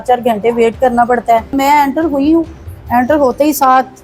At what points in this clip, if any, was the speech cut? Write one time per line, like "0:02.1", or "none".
0:01.5